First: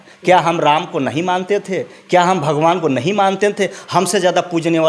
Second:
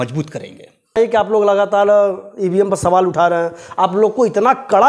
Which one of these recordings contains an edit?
second; 1 cut; at 1.1 s

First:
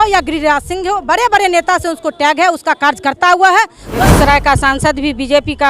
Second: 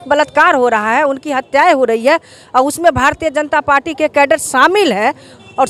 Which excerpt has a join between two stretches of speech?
first; 1 cut; at 4.1 s

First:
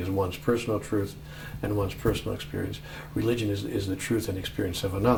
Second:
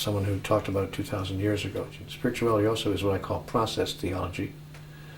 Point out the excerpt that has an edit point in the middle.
second; 1 cut; at 2.0 s

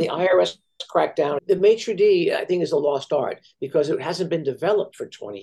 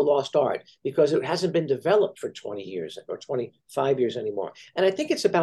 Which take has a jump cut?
first; 1 cut; at 1.4 s

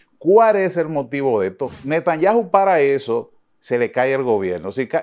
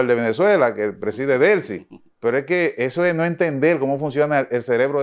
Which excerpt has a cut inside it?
first; 1 cut; at 1.7 s

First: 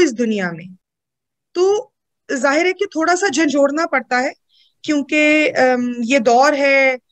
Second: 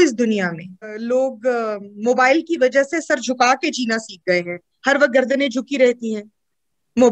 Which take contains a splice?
second; 1 cut; at 0.9 s

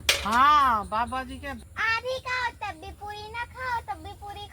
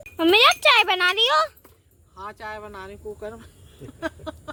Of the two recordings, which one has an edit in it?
first; 1 cut; at 1.5 s

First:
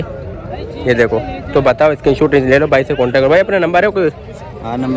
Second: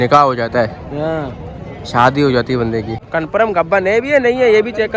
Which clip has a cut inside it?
second; 1 cut; at 3.0 s

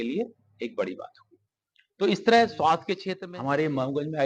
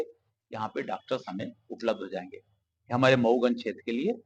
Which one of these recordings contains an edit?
first; 1 cut; at 3.1 s

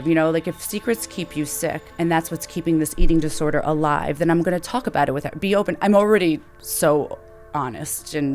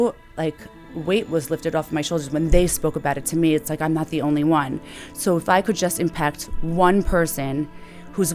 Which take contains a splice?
first; 1 cut; at 1.9 s

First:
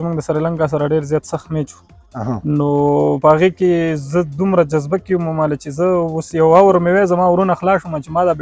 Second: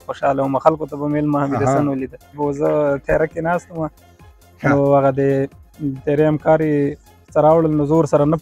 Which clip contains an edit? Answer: second; 1 cut; at 2.3 s

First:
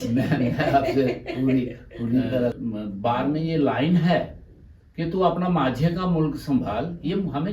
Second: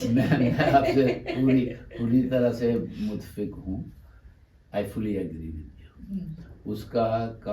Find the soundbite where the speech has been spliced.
first; 1 cut; at 2.6 s

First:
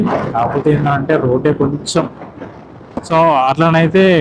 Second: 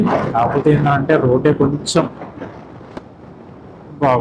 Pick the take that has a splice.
first; 1 cut; at 3.0 s

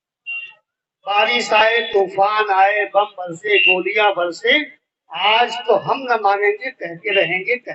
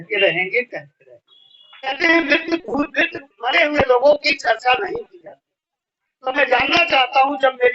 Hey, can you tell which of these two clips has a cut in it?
second; 1 cut; at 1.9 s

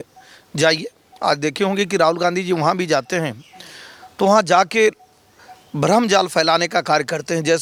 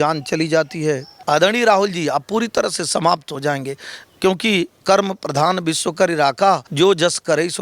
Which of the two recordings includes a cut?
second; 2 cuts; at 1.1 s, 6.7 s

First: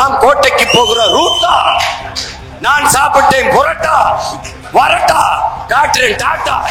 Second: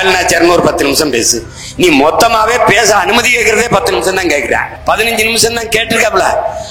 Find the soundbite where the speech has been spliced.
second; 1 cut; at 4.7 s

